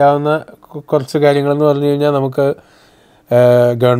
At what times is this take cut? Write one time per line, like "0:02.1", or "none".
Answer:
none